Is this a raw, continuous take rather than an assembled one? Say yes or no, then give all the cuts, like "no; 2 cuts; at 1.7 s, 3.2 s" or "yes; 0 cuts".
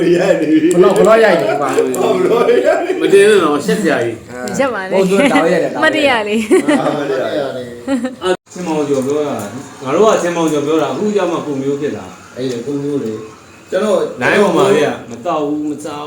no; 1 cut; at 8.5 s